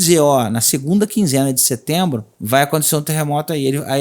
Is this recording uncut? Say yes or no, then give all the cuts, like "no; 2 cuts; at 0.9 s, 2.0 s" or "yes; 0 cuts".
no; 1 cut; at 2.3 s